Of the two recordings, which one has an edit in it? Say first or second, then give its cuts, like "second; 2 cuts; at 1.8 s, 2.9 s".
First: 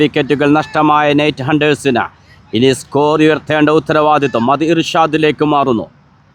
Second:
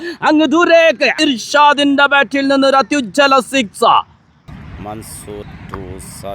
second; 2 cuts; at 1.2 s, 4.5 s